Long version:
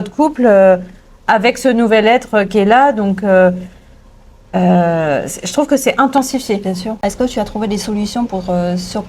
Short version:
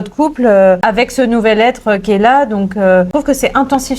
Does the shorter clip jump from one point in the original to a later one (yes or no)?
yes